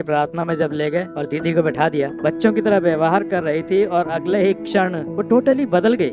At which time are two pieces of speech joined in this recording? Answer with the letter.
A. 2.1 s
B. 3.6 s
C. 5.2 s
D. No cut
A